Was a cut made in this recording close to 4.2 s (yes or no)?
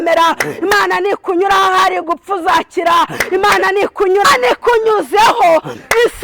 yes